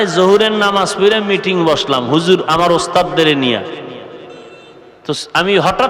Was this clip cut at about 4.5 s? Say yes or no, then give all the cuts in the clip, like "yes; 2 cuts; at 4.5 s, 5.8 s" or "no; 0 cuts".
yes; 1 cut; at 4.5 s